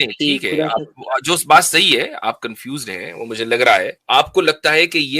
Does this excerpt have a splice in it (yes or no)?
yes